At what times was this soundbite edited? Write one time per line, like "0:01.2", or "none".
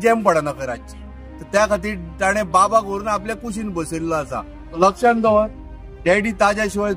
0:04.6